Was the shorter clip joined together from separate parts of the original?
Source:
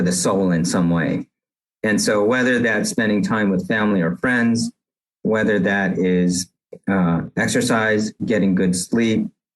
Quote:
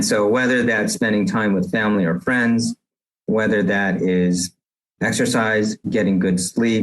yes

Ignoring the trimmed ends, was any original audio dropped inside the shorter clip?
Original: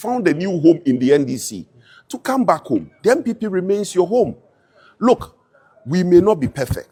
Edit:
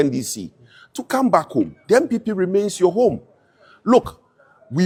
no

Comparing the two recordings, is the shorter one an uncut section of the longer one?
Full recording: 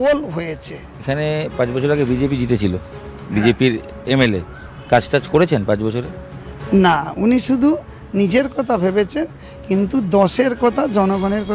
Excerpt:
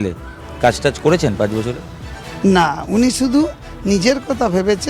yes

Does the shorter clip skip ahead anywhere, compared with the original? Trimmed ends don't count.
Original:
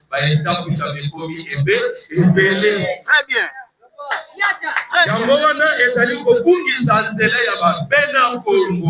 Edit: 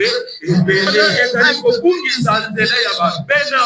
yes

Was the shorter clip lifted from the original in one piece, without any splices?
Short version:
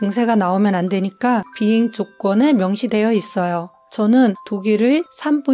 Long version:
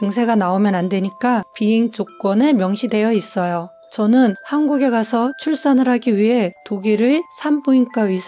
no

